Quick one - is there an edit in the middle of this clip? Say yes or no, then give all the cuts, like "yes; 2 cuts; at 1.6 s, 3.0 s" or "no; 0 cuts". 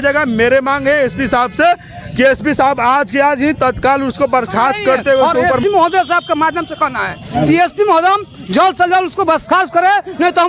yes; 1 cut; at 5.5 s